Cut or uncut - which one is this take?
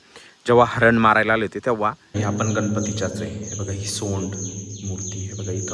cut